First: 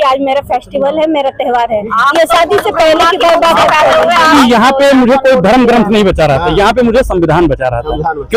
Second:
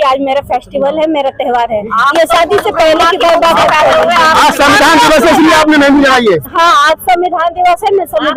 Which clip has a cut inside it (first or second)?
first